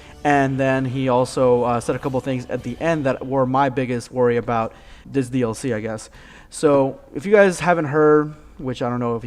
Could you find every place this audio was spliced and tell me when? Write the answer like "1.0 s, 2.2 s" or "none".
4.3 s